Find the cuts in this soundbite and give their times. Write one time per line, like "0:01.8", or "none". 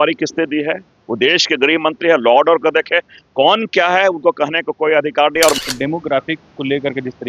0:05.6